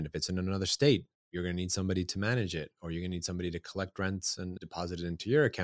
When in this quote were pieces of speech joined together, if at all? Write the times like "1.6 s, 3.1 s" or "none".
4.5 s